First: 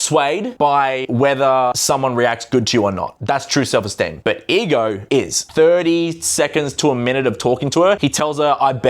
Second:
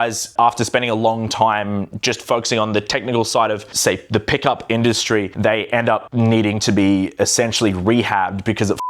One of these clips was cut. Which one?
first; 6 cuts; at 0.7 s, 1.8 s, 3.1 s, 4.1 s, 5.1 s, 8.0 s

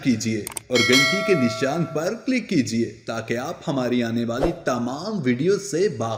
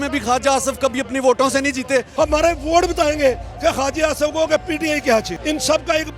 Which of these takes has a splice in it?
second; 2 cuts; at 2.1 s, 5.3 s

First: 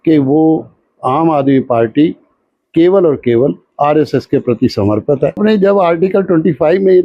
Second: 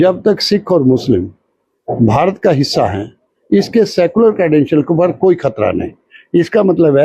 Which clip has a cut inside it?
first; 1 cut; at 5.4 s

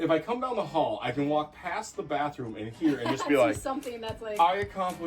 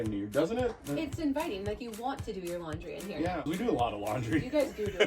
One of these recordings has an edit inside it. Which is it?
second; 1 cut; at 3.3 s

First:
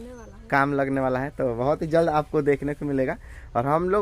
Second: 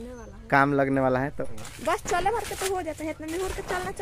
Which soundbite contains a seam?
second; 1 cut; at 1.3 s

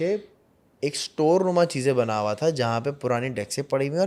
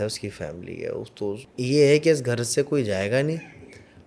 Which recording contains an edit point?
second; 1 cut; at 1.5 s

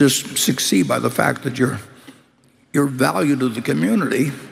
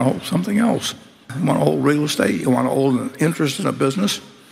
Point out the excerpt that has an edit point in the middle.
second; 1 cut; at 1.3 s

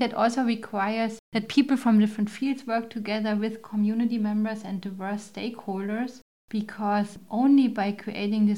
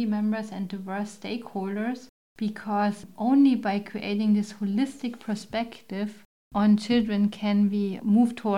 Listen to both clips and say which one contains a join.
first; 1 cut; at 1.2 s

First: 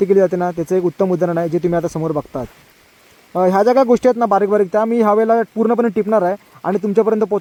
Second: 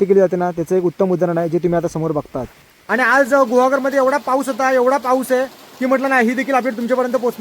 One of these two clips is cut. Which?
second; 1 cut; at 2.7 s

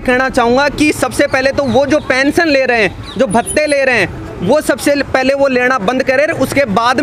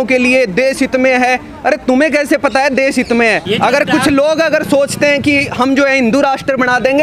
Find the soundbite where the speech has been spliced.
second; 1 cut; at 3.4 s

